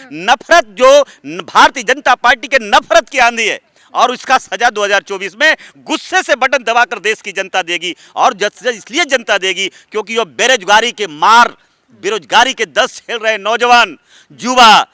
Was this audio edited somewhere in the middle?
no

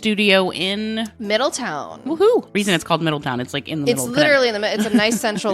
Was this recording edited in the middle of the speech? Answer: no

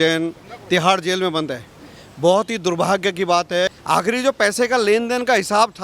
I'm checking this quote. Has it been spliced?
yes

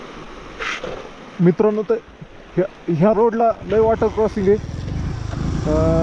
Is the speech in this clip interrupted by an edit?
no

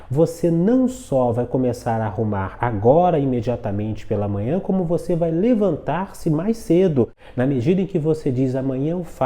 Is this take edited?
yes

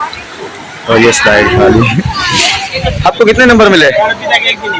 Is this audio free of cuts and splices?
no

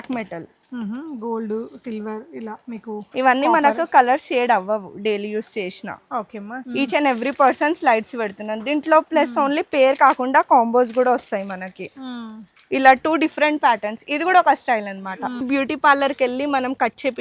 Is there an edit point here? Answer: yes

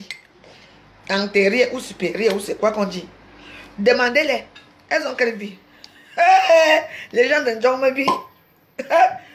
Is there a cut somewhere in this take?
no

